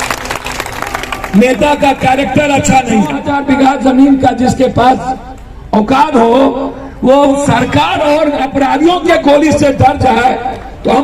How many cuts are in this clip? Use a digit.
1